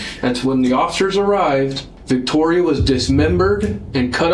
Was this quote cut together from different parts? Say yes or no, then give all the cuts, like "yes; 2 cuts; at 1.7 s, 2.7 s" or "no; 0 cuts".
yes; 1 cut; at 1.9 s